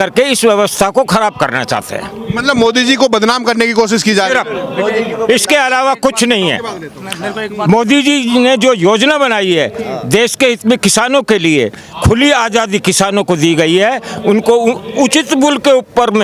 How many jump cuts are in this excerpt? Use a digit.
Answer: 0